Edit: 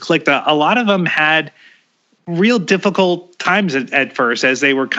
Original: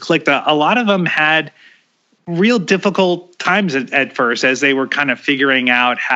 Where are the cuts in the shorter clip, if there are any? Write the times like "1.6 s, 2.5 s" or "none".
none